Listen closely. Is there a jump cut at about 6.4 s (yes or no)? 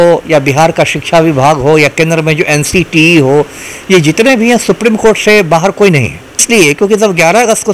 yes